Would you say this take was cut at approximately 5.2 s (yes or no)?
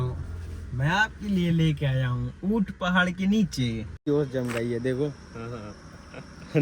no